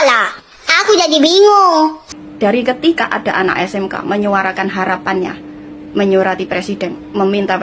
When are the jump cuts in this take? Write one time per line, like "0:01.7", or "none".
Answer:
0:02.0